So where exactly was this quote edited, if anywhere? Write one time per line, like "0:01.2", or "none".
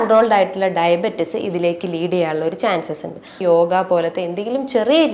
0:03.4

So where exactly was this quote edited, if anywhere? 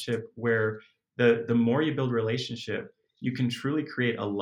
none

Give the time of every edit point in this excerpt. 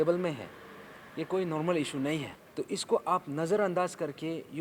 0:02.4

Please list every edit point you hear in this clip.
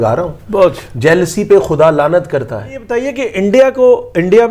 0:03.1

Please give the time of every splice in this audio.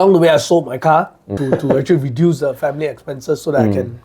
0:01.4

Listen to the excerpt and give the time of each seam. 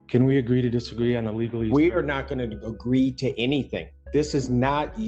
none

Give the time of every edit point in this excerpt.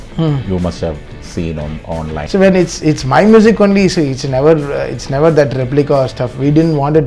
0:02.2

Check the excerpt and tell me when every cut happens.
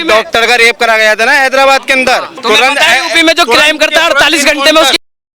0:02.3

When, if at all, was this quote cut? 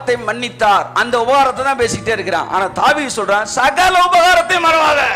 none

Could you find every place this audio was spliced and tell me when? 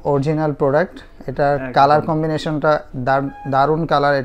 none

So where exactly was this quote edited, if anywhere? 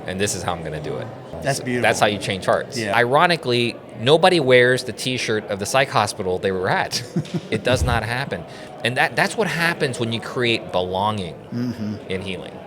0:01.4
0:02.9

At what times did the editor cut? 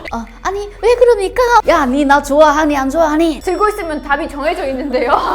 0:01.6
0:03.4

